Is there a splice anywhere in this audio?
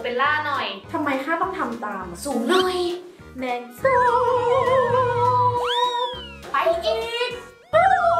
yes; 1 cut; at 6.4 s

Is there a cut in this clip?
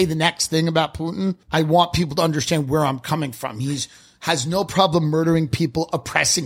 yes; 1 cut; at 1.4 s

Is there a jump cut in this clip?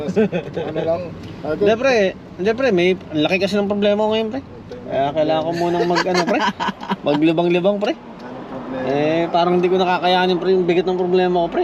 no; 0 cuts

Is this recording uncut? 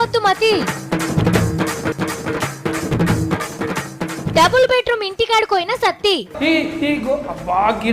no; 1 cut; at 1.9 s

